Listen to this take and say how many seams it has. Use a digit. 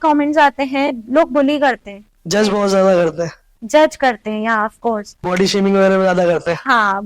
1